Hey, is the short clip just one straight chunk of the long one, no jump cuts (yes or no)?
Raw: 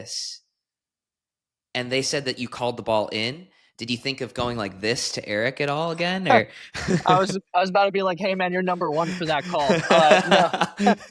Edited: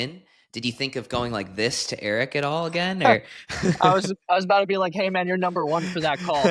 yes